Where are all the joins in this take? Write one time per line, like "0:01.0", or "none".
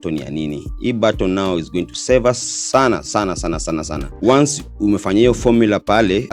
0:04.1